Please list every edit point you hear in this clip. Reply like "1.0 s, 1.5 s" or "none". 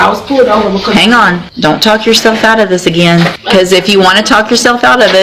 1.5 s, 3.4 s